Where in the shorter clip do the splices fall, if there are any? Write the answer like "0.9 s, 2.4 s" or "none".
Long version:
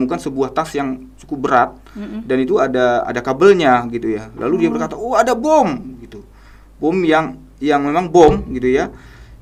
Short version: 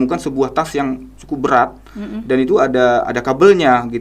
none